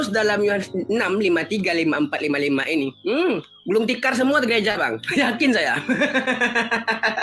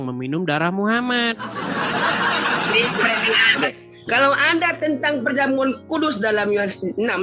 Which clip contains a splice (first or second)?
second